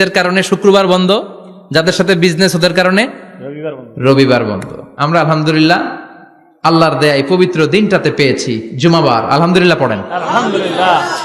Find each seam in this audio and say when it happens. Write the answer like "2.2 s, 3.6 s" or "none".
none